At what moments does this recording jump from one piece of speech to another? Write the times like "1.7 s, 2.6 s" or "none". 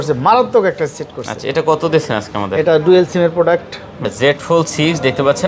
4.0 s